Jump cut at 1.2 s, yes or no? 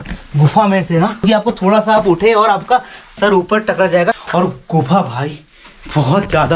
yes